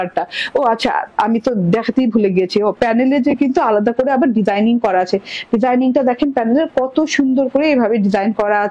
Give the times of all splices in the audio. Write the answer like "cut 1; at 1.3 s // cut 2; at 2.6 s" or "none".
cut 1; at 7.3 s

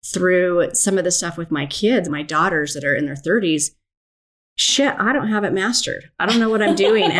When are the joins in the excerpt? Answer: cut 1; at 2.0 s

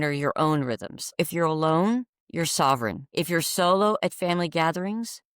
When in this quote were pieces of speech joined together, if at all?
cut 1; at 1.1 s // cut 2; at 3.0 s

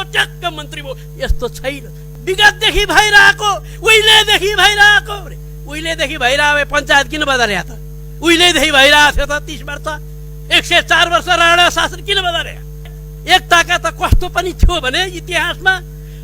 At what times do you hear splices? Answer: cut 1; at 2.1 s // cut 2; at 13.1 s

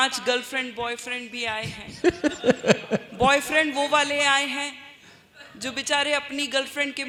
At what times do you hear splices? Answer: none

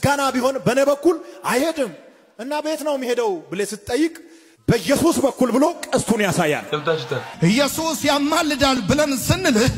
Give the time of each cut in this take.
cut 1; at 7.3 s

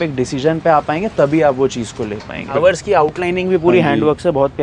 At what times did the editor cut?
cut 1; at 2.5 s

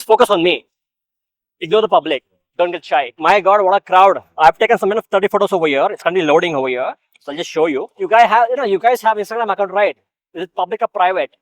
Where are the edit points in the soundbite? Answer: cut 1; at 3.1 s // cut 2; at 7.9 s

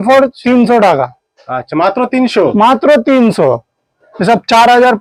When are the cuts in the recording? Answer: none

